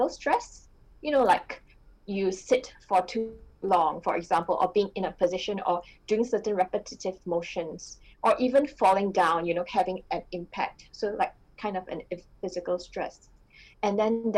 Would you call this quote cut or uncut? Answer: uncut